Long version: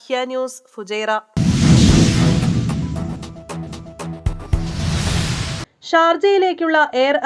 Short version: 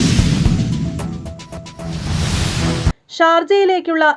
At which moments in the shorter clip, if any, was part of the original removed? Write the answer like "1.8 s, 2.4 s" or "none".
1.8 s